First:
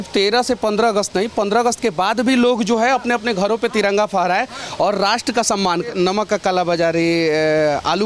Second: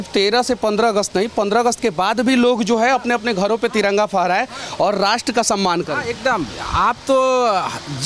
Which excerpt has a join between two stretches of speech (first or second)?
first